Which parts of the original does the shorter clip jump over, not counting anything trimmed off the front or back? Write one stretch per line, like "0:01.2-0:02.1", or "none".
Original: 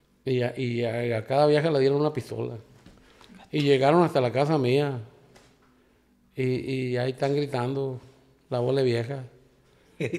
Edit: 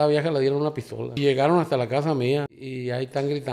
0:02.5-0:03.6
0:05.1-0:06.7